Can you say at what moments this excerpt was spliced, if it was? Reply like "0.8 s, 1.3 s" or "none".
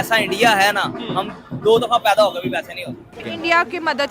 3.0 s